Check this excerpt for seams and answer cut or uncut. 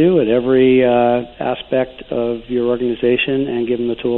uncut